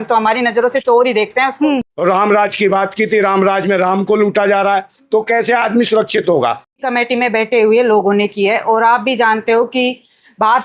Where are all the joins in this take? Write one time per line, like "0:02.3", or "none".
0:01.9
0:06.8